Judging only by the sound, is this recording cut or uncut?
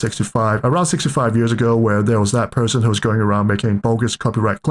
cut